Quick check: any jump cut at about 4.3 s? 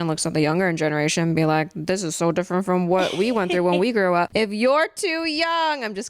yes; 1 cut; at 4.3 s

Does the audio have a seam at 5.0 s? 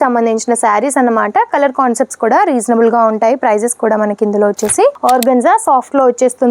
yes; 1 cut; at 5.0 s

